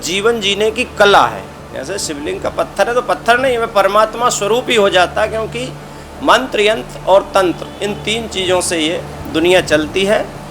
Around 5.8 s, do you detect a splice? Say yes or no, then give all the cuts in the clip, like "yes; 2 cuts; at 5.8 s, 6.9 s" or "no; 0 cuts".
no; 1 cut; at 1.5 s